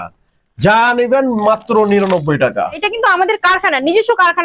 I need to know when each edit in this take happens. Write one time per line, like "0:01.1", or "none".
0:02.8